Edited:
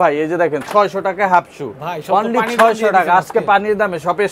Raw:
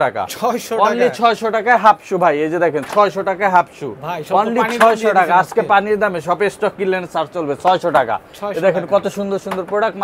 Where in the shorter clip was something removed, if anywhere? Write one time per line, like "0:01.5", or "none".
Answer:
none